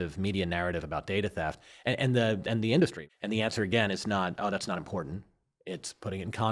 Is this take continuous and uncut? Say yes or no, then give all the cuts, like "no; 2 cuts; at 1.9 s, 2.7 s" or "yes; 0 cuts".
no; 1 cut; at 3.0 s